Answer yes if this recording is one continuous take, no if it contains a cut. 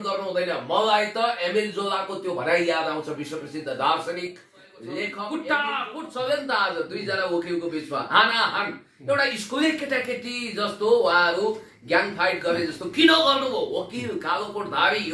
no